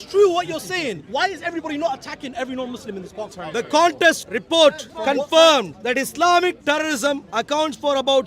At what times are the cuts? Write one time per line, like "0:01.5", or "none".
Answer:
0:01.0
0:03.2
0:04.3
0:04.9
0:05.8